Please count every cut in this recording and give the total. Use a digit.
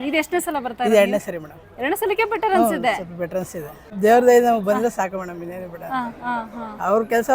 1